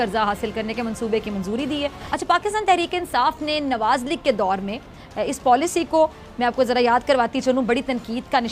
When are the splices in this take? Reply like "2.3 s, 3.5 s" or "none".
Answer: 2.1 s